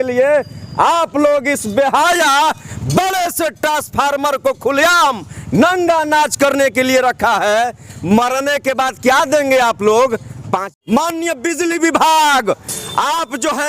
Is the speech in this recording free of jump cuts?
no; 1 cut; at 10.7 s

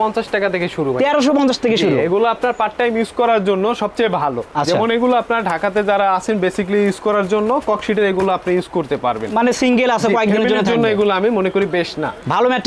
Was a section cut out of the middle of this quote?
no; 0 cuts

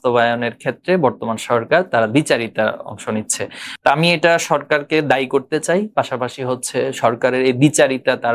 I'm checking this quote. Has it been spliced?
yes; 1 cut; at 3.6 s

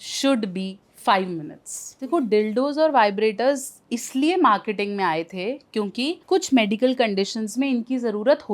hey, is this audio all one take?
no; 2 cuts; at 2.3 s, 6.2 s

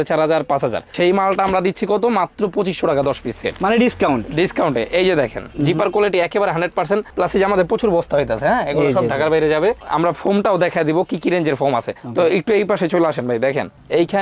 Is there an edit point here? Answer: no; 0 cuts

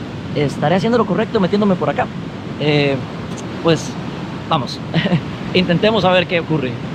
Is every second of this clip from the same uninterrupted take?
yes; 0 cuts

